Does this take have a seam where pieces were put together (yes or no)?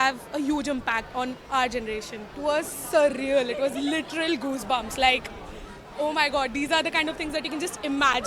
yes